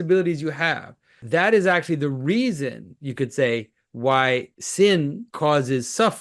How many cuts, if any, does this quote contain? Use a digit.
3